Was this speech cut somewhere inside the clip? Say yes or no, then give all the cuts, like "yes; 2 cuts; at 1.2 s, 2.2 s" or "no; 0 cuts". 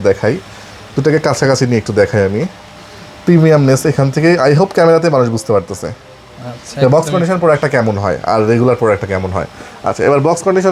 no; 0 cuts